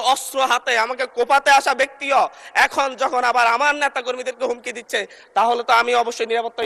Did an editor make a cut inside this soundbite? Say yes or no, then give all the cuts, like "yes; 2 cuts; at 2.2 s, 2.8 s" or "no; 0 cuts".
no; 0 cuts